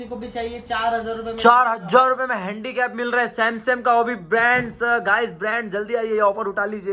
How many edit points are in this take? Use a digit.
0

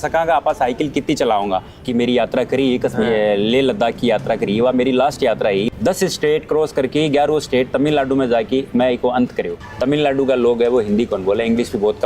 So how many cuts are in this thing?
3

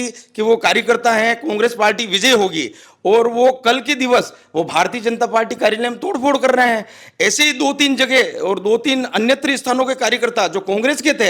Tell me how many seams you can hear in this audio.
0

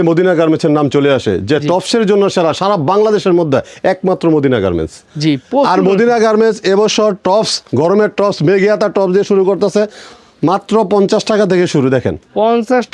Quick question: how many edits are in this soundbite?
0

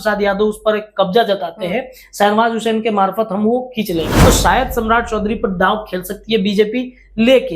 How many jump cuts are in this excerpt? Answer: 1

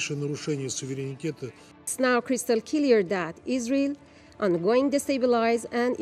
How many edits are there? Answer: 1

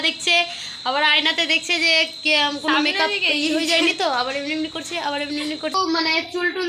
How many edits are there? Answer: 1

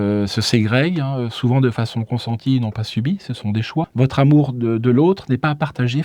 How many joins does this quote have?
1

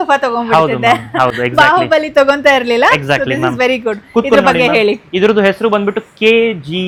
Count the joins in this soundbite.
0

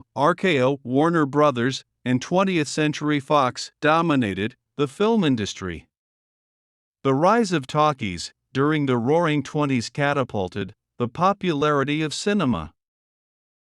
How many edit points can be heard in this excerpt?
1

